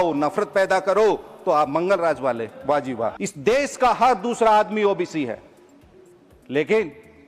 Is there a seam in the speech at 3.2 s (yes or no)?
yes